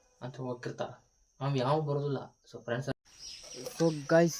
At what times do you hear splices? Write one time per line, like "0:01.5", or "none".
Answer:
0:02.9